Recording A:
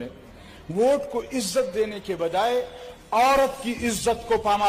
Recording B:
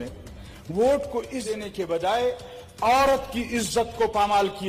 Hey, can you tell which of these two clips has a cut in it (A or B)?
B